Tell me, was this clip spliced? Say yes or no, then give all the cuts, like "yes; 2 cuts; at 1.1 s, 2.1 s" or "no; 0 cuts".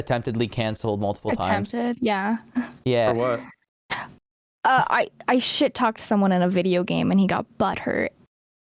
no; 0 cuts